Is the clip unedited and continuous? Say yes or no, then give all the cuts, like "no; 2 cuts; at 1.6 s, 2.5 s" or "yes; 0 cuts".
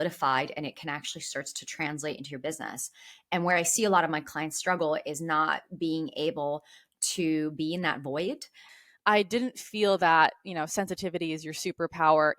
no; 1 cut; at 8.7 s